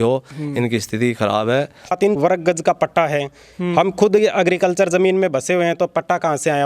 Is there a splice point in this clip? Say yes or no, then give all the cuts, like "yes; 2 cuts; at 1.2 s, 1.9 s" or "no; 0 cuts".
yes; 1 cut; at 2.0 s